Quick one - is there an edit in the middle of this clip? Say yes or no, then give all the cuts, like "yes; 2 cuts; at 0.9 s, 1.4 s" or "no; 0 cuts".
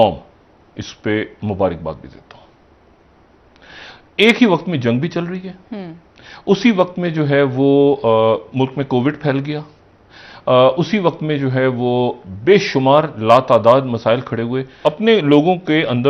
yes; 1 cut; at 14.7 s